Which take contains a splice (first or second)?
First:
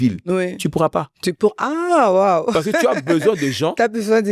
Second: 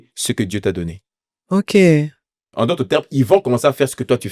second